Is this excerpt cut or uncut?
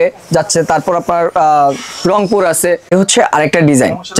cut